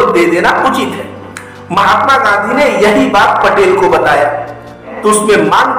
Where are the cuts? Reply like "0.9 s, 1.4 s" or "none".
4.9 s

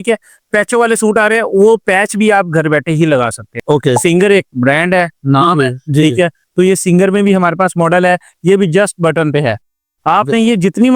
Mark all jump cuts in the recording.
3.5 s

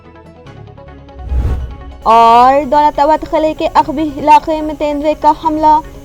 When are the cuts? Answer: 1.9 s

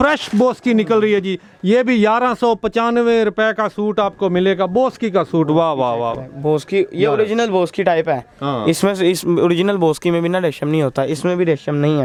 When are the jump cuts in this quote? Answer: none

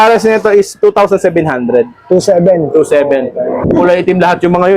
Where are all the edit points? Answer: 3.6 s

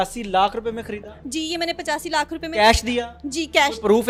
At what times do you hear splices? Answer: none

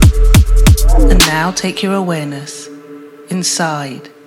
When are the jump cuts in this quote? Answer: 1.3 s

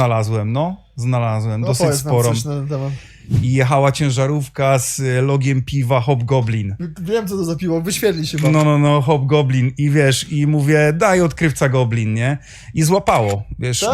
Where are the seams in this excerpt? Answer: 3.2 s

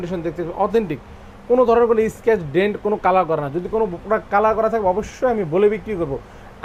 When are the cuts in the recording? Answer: none

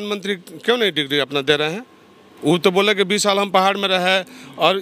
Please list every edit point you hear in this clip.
none

